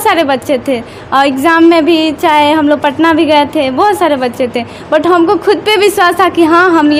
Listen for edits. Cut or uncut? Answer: uncut